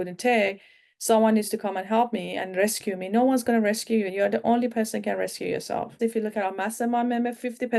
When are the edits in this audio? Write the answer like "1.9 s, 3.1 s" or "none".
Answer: 4.1 s, 6.0 s